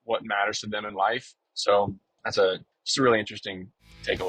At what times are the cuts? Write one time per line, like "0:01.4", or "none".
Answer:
0:01.4